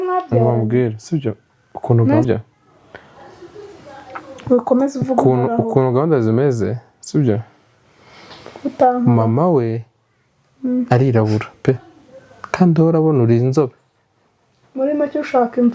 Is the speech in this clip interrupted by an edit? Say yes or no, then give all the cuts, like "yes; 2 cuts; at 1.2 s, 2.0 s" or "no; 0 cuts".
yes; 1 cut; at 2.3 s